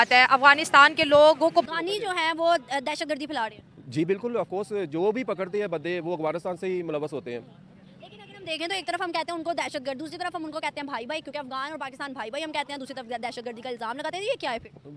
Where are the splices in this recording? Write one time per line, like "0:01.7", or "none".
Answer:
0:01.6